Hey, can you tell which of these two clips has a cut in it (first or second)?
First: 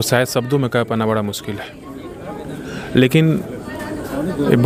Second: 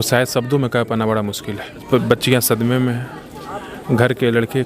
second